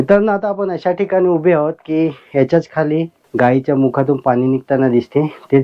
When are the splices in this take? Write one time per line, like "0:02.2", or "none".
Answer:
0:03.2